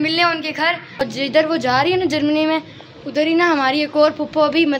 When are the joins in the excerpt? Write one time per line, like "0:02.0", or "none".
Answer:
0:01.0